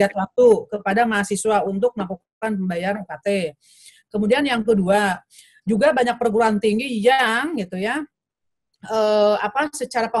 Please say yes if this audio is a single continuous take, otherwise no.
yes